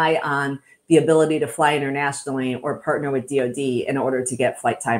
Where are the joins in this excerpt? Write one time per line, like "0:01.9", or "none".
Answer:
none